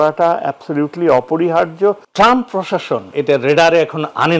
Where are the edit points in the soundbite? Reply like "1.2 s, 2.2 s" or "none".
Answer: 2.0 s, 3.1 s